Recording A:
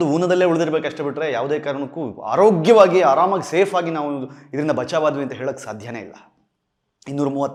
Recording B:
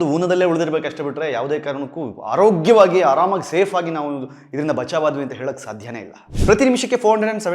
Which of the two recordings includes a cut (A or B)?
B